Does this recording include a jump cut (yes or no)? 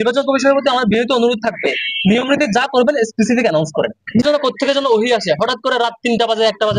yes